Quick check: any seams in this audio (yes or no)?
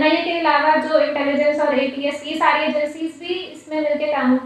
no